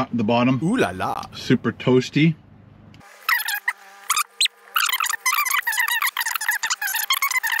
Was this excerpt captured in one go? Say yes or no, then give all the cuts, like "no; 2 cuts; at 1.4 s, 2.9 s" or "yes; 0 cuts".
yes; 0 cuts